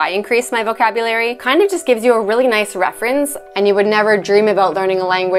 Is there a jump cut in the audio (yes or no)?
yes